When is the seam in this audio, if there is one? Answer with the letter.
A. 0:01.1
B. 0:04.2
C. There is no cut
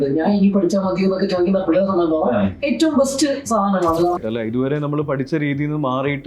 B